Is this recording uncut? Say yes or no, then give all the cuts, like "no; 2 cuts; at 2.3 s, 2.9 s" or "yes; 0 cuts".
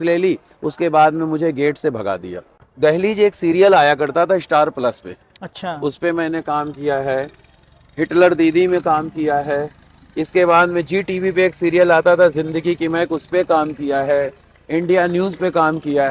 no; 1 cut; at 2.6 s